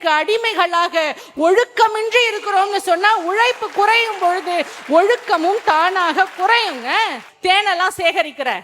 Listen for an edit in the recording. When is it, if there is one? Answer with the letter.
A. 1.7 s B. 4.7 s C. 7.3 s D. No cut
C